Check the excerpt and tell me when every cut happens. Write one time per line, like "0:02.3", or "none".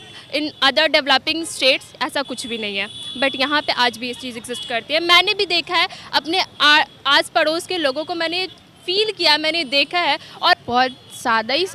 0:10.6